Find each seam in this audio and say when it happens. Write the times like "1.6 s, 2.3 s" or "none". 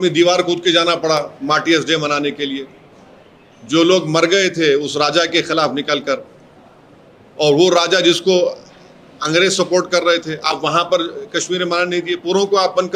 none